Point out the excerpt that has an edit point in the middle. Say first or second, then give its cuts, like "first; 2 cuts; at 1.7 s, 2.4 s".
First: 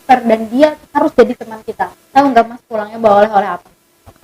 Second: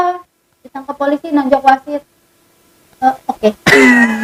first; 1 cut; at 2.0 s